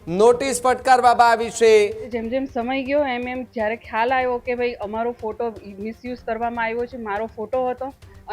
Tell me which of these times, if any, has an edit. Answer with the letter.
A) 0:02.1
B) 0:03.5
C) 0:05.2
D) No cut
A